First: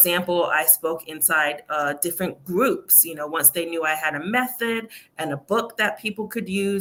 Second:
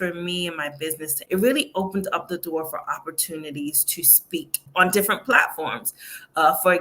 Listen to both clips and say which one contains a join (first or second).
second